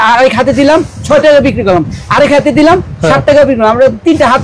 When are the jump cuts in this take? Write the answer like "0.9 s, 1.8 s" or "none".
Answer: none

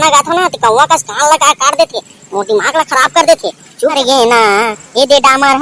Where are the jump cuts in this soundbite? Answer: 3.9 s

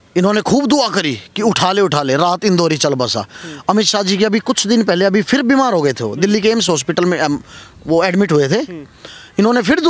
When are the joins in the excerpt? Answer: none

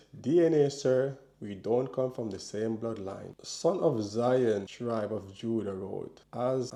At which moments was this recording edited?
none

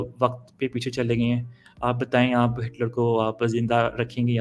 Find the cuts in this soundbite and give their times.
none

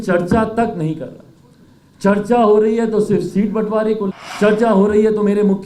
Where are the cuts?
4.2 s

